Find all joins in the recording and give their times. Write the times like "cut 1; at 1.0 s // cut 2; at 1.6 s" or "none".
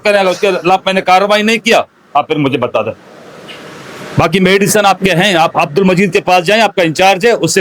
none